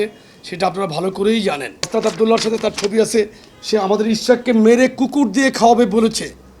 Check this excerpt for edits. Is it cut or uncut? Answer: cut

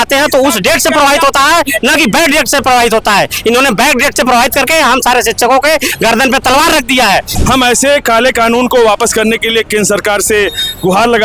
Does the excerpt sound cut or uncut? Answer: cut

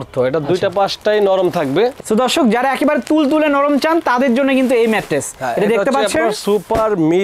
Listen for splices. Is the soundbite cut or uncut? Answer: uncut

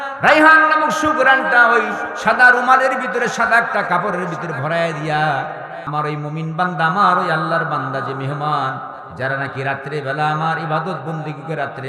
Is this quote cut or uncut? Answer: cut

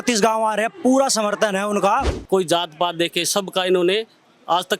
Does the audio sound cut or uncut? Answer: cut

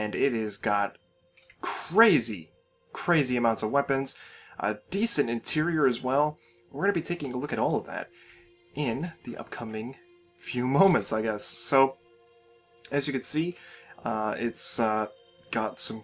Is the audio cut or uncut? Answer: cut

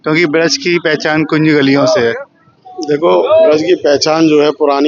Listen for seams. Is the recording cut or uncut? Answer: uncut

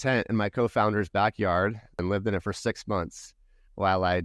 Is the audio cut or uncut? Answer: cut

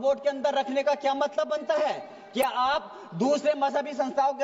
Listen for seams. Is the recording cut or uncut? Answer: uncut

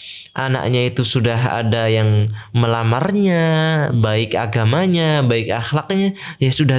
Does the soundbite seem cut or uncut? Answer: uncut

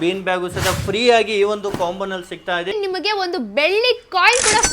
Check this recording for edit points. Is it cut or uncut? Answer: cut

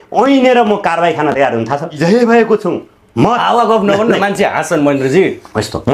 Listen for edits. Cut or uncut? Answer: cut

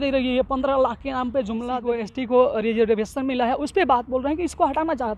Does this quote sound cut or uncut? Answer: cut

